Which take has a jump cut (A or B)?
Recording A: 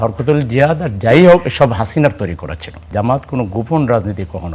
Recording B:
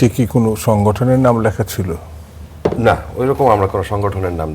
A